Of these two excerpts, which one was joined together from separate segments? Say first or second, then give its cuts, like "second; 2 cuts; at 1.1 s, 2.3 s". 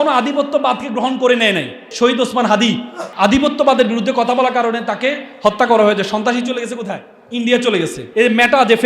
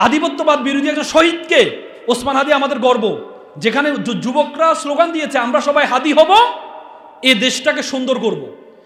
first; 4 cuts; at 1.9 s, 3.1 s, 7.1 s, 8.0 s